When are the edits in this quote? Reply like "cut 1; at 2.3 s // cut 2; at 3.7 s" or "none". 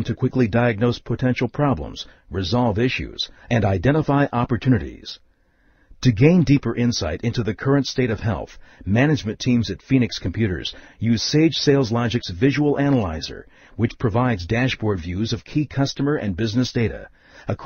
none

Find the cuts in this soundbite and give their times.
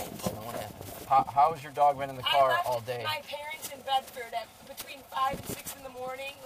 cut 1; at 1.0 s

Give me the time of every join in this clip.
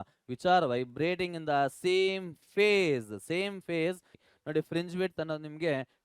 cut 1; at 4.1 s

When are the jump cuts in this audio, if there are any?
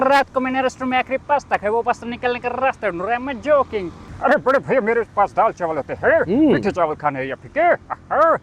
cut 1; at 4.0 s

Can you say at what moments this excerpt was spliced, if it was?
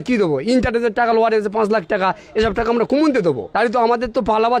cut 1; at 3.4 s

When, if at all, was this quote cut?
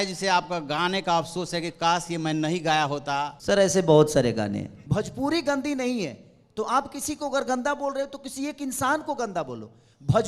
cut 1; at 3.4 s // cut 2; at 4.7 s

